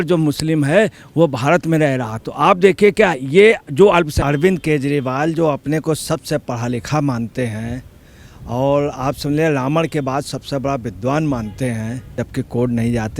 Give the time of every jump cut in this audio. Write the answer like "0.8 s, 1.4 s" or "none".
4.2 s, 12.2 s